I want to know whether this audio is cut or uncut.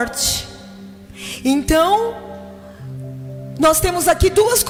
uncut